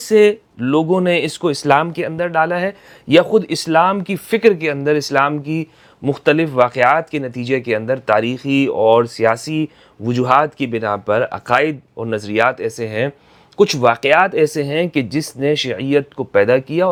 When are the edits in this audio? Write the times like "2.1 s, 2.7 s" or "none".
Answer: none